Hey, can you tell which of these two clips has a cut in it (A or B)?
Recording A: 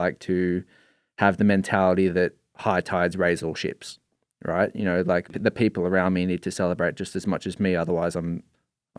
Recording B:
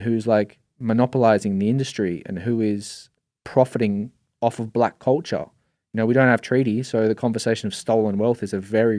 A